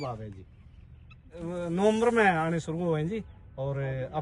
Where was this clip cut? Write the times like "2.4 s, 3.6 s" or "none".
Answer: 1.4 s